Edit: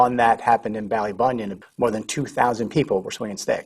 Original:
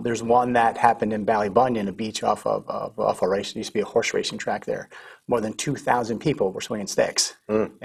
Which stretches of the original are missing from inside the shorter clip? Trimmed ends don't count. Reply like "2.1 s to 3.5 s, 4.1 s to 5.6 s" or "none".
2.0 s to 5.1 s